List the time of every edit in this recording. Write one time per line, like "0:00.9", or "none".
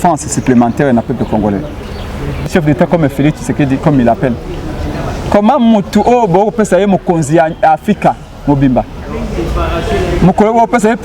0:02.5